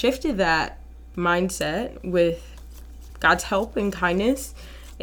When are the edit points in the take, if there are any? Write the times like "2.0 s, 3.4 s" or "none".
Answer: none